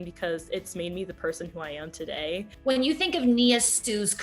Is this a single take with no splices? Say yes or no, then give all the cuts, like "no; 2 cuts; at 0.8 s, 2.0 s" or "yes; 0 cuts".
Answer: no; 1 cut; at 2.4 s